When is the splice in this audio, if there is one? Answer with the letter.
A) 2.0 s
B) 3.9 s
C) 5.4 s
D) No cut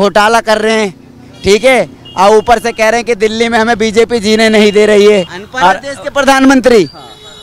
C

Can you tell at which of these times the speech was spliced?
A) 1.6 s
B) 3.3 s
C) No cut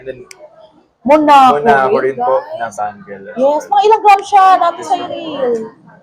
C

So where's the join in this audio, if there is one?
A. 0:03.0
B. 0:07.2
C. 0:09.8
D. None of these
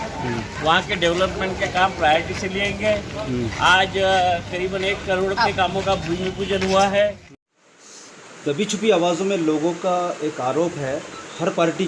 B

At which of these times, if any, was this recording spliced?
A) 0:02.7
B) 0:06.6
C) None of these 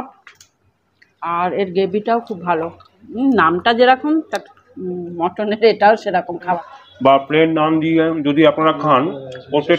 B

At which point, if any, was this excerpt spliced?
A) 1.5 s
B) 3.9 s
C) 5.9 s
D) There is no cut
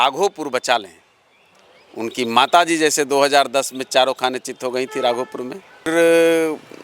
C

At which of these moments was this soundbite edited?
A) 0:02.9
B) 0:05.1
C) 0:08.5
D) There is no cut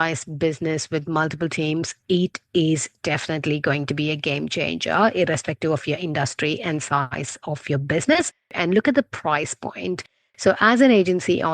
C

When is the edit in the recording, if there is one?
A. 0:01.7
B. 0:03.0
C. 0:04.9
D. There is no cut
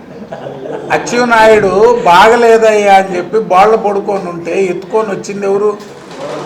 D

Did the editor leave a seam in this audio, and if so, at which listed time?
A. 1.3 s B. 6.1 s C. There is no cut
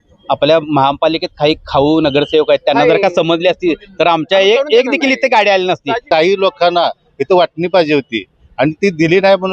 B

